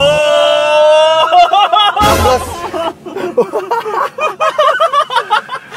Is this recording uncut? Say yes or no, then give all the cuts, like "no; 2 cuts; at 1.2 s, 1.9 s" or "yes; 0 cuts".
yes; 0 cuts